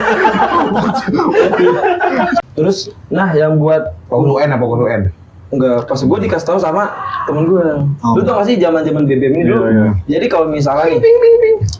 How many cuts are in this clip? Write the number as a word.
one